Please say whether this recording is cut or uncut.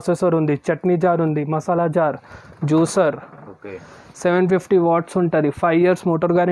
uncut